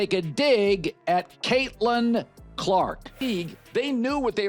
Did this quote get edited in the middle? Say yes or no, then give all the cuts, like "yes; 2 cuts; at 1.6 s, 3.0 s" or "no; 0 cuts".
yes; 1 cut; at 3.1 s